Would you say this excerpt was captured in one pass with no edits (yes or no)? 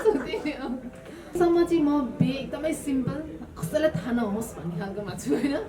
no